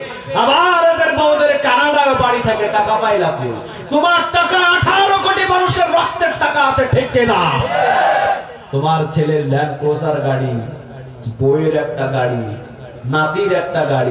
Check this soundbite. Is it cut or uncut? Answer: uncut